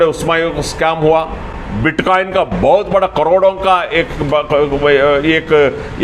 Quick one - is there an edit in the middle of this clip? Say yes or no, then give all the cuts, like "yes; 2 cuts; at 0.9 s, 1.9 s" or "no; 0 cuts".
no; 0 cuts